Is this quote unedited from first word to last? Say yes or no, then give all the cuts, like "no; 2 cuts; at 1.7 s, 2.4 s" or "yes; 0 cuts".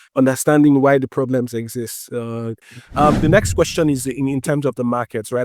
no; 1 cut; at 2.6 s